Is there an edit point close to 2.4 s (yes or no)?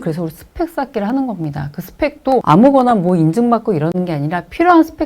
yes